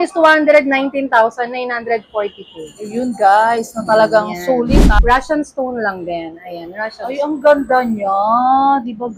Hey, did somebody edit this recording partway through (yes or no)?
yes